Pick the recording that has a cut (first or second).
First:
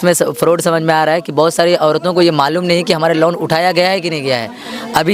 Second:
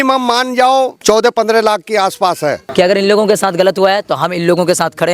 second